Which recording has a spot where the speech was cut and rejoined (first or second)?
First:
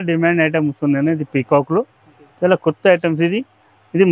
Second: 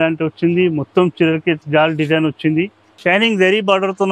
second